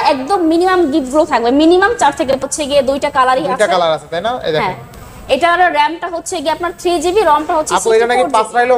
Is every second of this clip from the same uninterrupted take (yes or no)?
no